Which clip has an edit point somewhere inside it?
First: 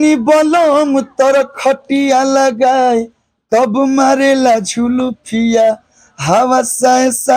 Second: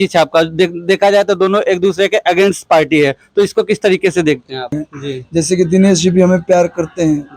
second; 1 cut; at 4.8 s

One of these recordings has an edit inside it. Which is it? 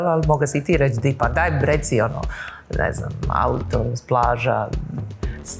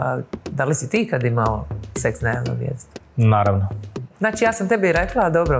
second; 1 cut; at 4.0 s

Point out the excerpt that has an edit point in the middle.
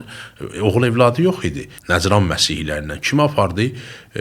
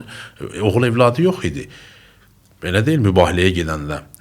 first; 1 cut; at 1.7 s

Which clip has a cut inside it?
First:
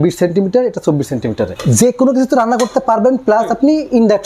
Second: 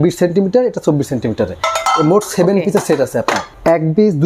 first; 1 cut; at 1.6 s

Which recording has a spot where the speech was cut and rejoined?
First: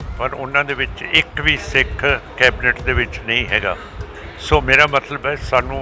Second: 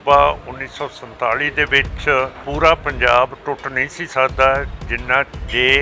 second; 1 cut; at 2.4 s

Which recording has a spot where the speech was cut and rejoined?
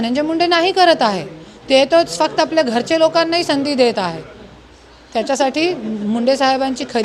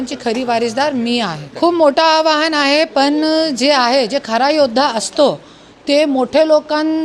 second; 1 cut; at 1.4 s

